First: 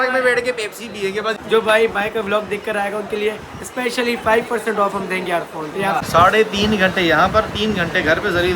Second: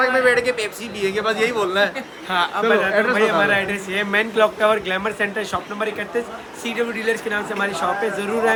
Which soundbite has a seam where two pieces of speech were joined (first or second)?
first